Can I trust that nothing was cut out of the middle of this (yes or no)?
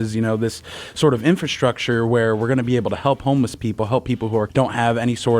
no